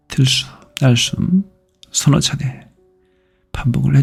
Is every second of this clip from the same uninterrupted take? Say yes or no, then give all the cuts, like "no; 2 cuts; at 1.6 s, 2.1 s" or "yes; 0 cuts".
yes; 0 cuts